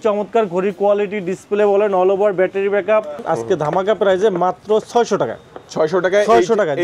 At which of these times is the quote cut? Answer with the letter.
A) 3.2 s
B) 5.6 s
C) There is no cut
A